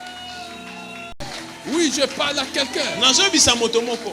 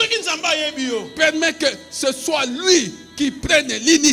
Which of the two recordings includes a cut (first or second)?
first